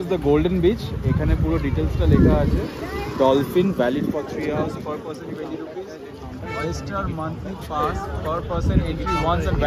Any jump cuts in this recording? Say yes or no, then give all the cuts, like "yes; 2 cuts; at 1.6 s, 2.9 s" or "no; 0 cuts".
no; 0 cuts